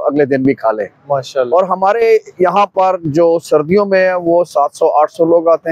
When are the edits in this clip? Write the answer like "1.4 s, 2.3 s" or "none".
none